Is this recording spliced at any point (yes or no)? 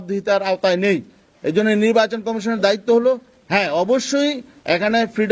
no